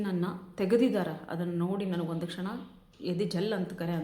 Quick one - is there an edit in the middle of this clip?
no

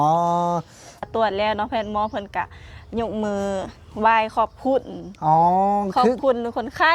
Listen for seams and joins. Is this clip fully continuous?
no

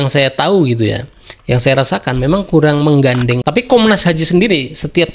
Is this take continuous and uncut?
no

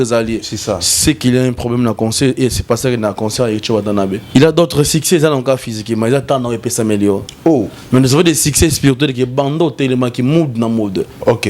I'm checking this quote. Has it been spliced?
yes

